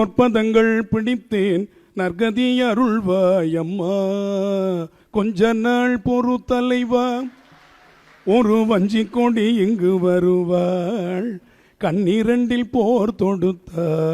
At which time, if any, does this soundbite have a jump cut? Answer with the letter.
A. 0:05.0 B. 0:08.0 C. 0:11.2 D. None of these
A